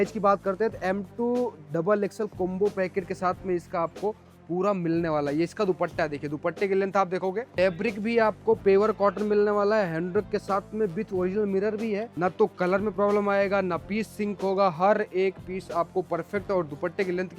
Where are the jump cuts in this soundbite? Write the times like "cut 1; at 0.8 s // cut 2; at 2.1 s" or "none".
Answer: cut 1; at 7.6 s // cut 2; at 12.1 s